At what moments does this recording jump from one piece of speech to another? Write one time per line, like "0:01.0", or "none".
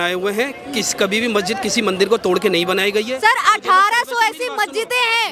none